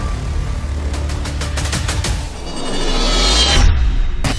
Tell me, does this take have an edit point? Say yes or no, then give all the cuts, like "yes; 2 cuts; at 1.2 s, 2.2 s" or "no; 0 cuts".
yes; 1 cut; at 2.4 s